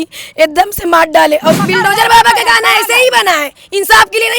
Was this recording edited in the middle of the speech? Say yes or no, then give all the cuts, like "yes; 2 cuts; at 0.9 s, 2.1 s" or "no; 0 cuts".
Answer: yes; 1 cut; at 1.6 s